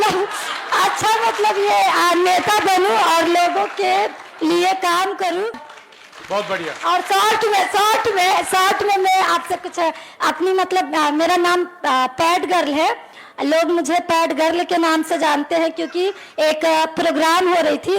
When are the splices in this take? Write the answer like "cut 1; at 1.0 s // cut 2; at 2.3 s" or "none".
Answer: cut 1; at 5.7 s